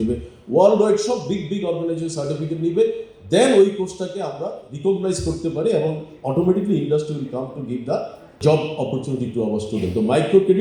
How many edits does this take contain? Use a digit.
1